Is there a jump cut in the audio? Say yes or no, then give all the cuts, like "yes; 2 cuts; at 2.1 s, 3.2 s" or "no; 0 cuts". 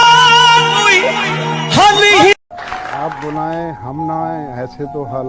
yes; 1 cut; at 2.4 s